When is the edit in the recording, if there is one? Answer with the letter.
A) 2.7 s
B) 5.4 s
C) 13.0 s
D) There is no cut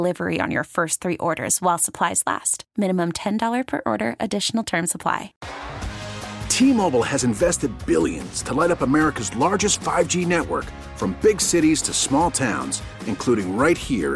B